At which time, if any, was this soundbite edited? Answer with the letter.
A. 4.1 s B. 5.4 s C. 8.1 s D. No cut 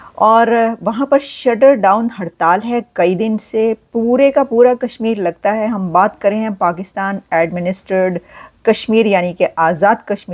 D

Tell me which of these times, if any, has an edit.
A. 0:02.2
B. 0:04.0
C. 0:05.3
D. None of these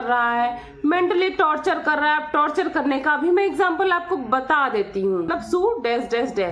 C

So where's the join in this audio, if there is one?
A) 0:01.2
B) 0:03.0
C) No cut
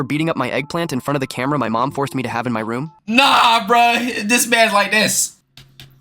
B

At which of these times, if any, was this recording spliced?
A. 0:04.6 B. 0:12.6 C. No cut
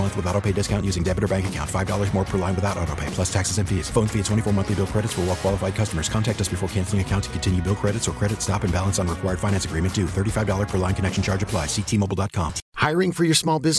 B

